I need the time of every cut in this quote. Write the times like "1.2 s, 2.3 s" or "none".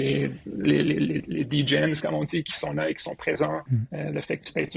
3.7 s